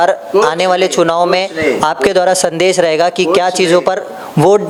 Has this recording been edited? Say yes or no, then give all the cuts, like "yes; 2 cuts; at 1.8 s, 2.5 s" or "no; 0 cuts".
no; 0 cuts